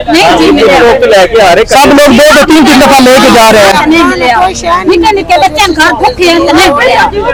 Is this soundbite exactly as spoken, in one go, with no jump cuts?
yes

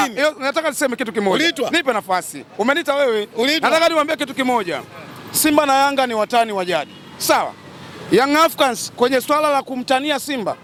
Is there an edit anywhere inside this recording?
no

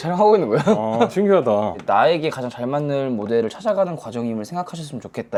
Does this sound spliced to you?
no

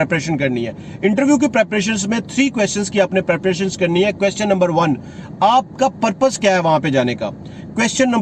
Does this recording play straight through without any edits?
yes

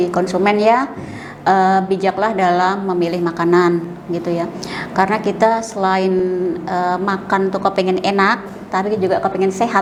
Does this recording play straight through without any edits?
yes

